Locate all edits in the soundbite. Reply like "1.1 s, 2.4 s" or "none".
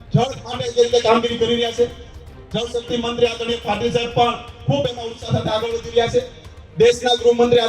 none